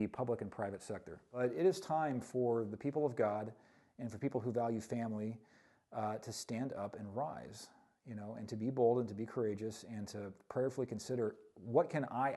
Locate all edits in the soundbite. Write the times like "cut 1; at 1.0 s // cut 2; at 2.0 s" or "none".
cut 1; at 1.3 s